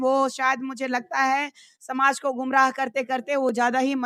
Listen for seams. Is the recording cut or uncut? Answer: uncut